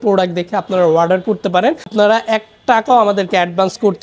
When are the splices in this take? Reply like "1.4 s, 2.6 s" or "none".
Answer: 1.8 s